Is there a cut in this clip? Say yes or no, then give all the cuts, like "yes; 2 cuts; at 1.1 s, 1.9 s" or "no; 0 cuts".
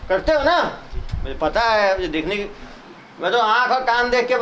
no; 0 cuts